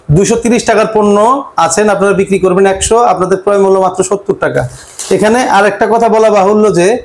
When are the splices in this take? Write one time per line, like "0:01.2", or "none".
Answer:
none